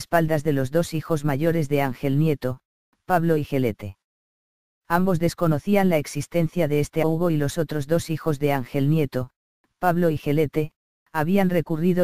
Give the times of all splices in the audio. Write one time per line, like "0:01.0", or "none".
none